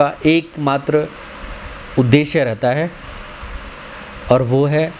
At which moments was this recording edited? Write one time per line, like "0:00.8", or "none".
none